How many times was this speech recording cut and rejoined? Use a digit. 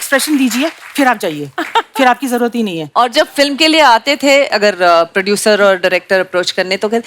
0